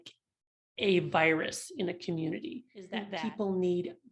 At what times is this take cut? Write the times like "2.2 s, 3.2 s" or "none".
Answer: 3.0 s